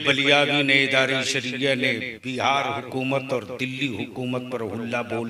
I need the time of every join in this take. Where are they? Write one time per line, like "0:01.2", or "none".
none